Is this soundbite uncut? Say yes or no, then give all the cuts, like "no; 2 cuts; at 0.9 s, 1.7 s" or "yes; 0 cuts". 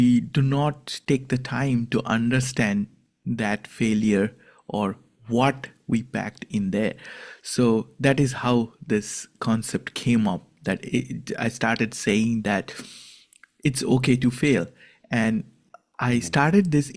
yes; 0 cuts